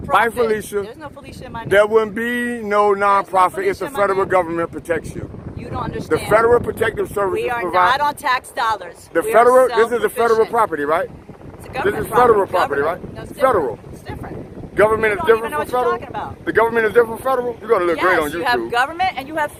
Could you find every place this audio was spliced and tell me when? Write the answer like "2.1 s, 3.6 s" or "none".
none